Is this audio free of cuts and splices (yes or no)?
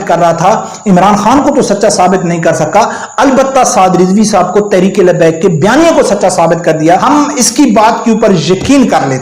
no